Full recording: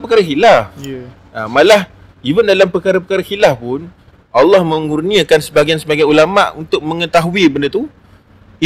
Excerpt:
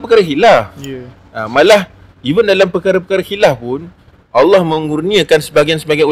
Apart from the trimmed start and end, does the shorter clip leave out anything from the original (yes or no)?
no